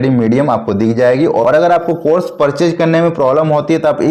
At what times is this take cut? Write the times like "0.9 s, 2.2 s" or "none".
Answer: 1.4 s